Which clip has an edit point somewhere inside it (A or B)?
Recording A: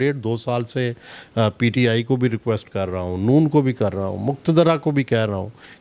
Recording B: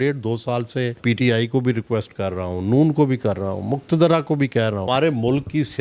B